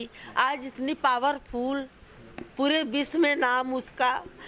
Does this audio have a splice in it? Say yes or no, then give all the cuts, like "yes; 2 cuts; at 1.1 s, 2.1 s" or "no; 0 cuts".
no; 0 cuts